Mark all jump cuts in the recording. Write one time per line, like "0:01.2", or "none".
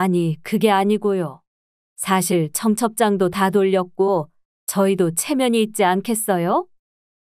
none